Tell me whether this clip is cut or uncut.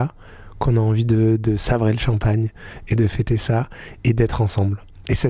uncut